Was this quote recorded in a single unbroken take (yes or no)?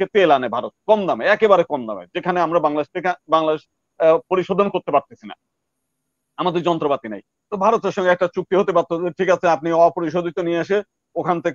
yes